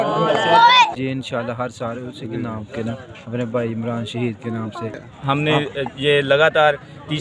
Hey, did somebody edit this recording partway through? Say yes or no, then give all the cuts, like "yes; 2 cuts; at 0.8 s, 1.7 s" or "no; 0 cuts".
yes; 2 cuts; at 0.9 s, 5.0 s